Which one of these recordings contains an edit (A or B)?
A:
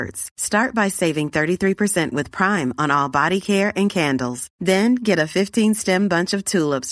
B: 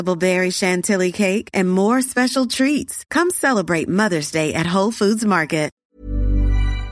B